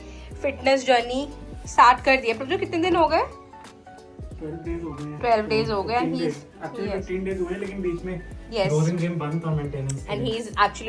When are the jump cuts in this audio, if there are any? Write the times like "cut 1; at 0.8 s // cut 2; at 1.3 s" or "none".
none

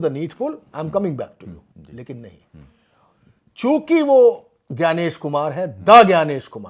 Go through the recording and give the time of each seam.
cut 1; at 1.7 s

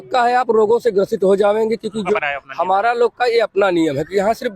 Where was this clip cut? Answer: cut 1; at 2.1 s

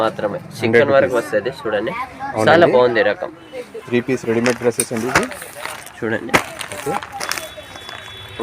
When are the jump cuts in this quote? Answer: cut 1; at 3.8 s

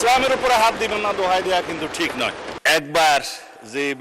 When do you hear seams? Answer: cut 1; at 2.5 s

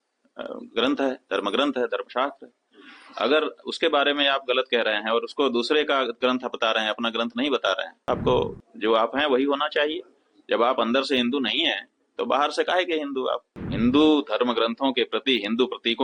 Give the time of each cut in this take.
cut 1; at 8.0 s // cut 2; at 13.5 s

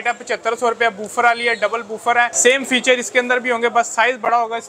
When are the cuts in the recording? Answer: cut 1; at 2.3 s

